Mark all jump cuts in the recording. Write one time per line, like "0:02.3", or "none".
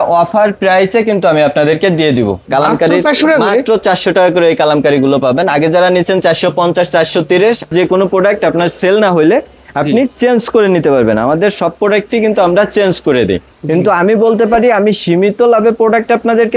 0:02.4
0:07.7
0:13.5